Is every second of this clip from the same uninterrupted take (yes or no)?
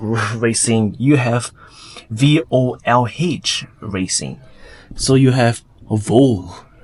yes